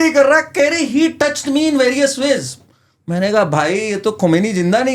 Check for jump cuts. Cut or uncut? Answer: uncut